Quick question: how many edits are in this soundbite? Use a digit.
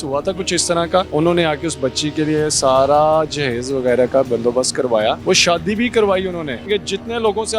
3